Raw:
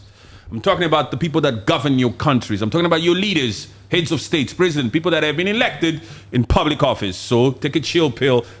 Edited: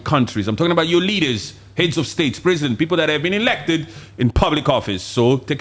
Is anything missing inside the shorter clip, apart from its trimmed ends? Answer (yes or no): no